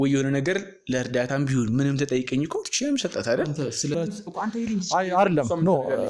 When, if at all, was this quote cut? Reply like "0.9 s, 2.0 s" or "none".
4.0 s

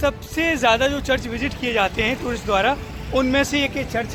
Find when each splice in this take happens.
none

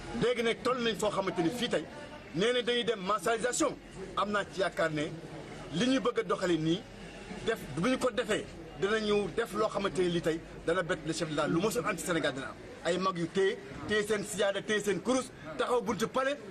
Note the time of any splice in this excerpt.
9.3 s

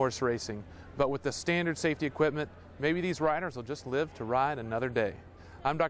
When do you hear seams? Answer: none

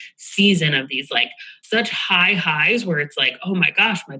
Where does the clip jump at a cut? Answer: 1.5 s

